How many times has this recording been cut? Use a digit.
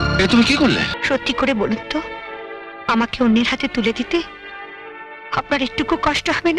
1